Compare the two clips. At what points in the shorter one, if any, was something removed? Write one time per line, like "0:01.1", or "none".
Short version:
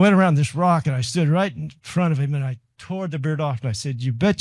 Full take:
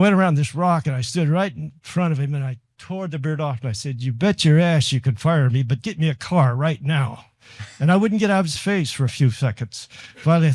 none